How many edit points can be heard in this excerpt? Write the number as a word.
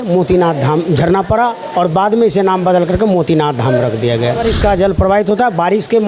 one